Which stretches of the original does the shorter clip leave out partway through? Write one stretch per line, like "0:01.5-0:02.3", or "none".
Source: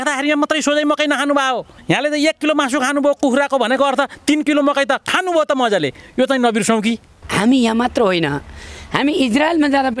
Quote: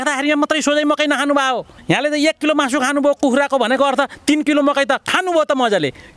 none